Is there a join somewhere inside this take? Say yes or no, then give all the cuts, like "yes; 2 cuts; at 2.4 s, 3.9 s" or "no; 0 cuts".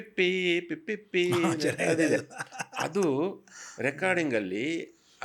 no; 0 cuts